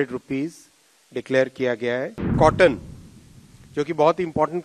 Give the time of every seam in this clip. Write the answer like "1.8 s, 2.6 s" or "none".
2.3 s